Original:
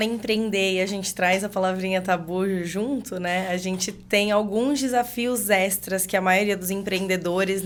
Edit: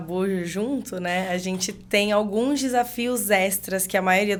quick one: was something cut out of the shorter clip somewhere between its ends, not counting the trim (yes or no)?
no